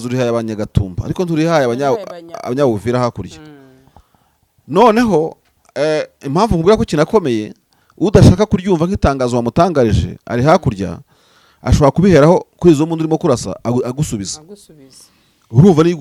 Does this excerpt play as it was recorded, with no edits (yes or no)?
yes